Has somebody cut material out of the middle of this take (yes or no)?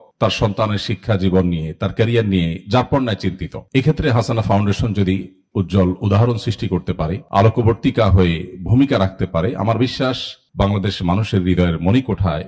no